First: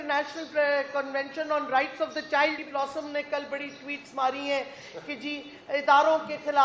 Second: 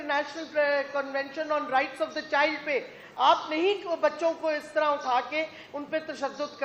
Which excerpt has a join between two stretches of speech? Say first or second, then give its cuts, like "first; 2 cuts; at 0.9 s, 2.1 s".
first; 1 cut; at 2.6 s